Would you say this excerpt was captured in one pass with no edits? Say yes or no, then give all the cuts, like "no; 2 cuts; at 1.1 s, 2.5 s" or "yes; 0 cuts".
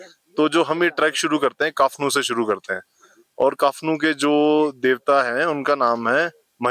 yes; 0 cuts